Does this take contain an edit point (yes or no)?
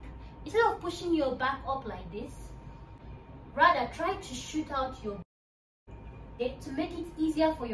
yes